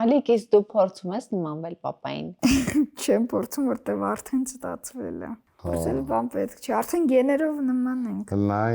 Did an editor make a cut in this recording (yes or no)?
yes